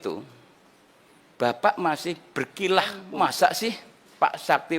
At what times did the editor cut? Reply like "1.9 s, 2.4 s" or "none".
3.0 s